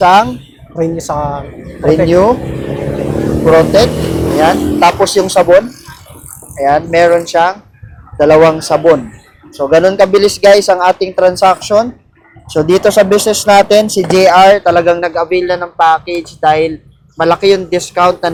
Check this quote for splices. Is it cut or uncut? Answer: uncut